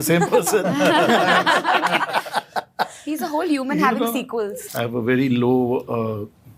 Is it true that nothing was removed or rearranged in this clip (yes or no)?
no